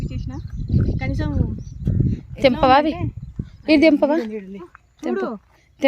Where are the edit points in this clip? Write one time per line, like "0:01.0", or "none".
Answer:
0:04.8